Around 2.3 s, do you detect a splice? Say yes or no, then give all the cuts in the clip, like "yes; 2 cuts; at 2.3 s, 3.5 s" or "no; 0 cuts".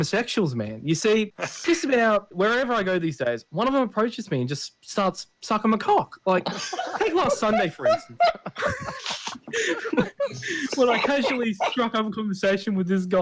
yes; 2 cuts; at 1.4 s, 2.3 s